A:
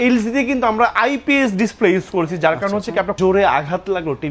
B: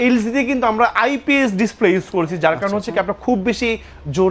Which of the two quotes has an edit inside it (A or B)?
A